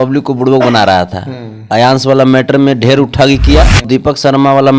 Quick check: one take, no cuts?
no; 1 cut; at 3.8 s

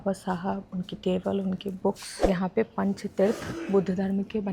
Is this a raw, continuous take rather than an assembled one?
no; 1 cut; at 2.1 s

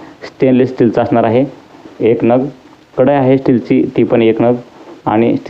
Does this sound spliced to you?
no; 0 cuts

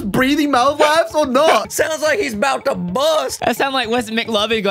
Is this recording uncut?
no; 2 cuts; at 1.6 s, 3.4 s

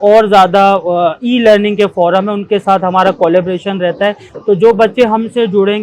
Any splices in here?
yes; 1 cut; at 4.3 s

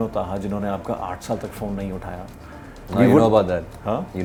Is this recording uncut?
yes; 0 cuts

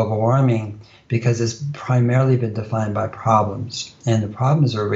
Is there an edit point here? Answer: no; 0 cuts

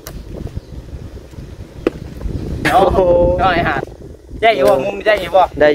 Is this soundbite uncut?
no; 1 cut; at 2.6 s

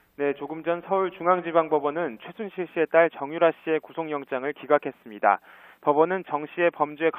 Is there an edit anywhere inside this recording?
no; 0 cuts

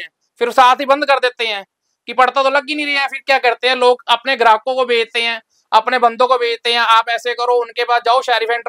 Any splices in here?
no; 0 cuts

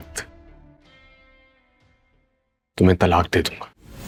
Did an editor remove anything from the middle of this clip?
no; 0 cuts

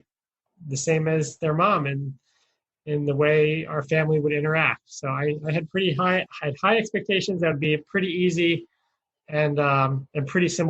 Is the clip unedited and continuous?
no; 1 cut; at 6.3 s

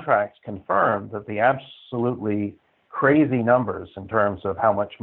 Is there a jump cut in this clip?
no; 0 cuts

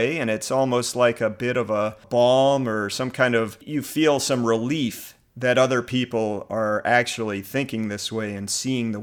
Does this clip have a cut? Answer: yes; 2 cuts; at 2.0 s, 3.6 s

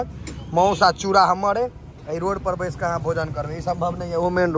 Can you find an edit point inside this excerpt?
no; 0 cuts

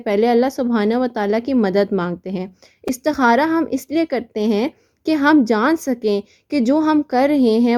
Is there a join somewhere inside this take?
no; 0 cuts

